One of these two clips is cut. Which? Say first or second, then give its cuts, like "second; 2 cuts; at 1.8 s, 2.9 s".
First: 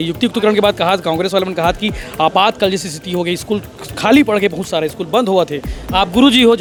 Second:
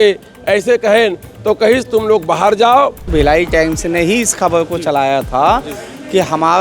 second; 1 cut; at 3.1 s